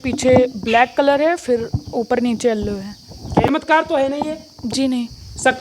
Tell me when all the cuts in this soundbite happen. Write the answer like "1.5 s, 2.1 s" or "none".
3.5 s